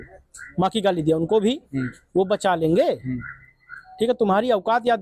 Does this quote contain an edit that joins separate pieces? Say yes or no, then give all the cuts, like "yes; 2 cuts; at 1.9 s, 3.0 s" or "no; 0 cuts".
no; 0 cuts